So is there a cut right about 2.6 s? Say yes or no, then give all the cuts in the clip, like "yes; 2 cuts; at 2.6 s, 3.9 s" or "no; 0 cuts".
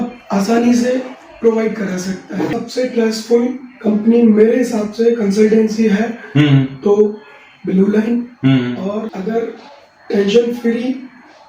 yes; 2 cuts; at 2.6 s, 9.1 s